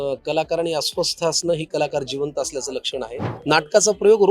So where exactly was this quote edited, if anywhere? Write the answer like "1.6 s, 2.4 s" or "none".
3.3 s